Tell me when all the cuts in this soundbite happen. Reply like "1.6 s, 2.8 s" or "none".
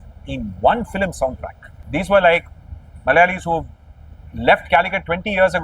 1.7 s